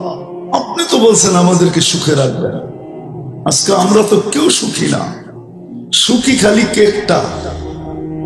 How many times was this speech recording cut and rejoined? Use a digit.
1